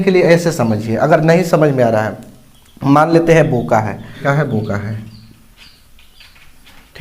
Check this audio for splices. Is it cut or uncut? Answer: cut